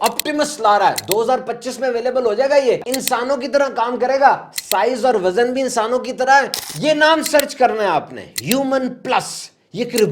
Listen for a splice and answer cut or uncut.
cut